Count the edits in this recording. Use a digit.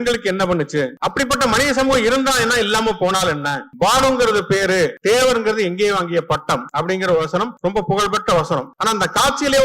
6